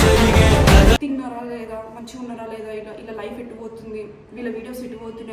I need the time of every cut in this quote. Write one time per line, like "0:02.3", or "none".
0:01.0